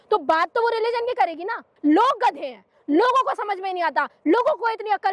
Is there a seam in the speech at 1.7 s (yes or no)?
yes